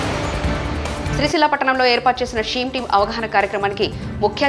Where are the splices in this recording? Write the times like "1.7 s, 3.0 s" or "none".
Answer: 1.1 s